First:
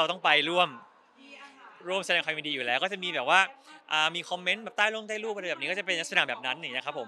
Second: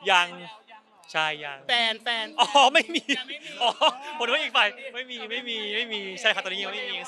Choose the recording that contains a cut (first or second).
second